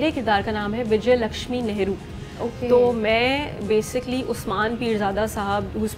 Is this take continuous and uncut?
yes; 0 cuts

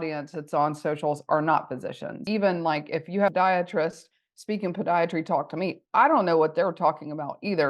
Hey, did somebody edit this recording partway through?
yes; 1 cut; at 2.2 s

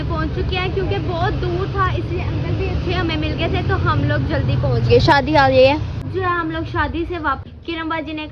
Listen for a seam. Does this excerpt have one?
yes; 2 cuts; at 6.0 s, 7.4 s

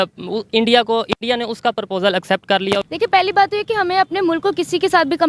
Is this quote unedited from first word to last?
no; 1 cut; at 2.9 s

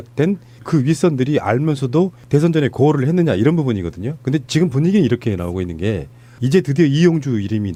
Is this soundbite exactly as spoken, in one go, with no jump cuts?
yes; 0 cuts

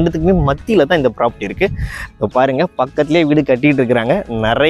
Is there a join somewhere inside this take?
yes; 1 cut; at 2.0 s

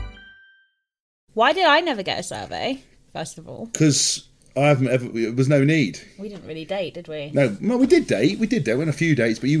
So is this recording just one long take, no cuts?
no; 1 cut; at 1.1 s

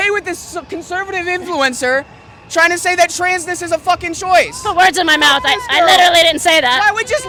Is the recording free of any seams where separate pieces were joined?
yes; 0 cuts

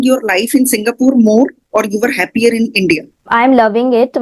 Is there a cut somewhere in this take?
yes; 1 cut; at 3.3 s

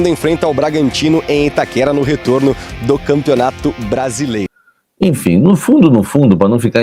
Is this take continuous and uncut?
no; 1 cut; at 4.5 s

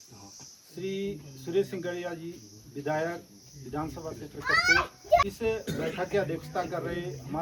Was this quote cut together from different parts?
yes; 1 cut; at 5.2 s

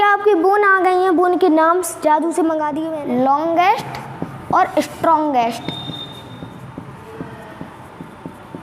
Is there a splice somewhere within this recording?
yes; 1 cut; at 2.8 s

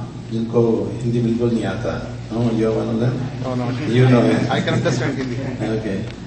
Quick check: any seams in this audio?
no; 0 cuts

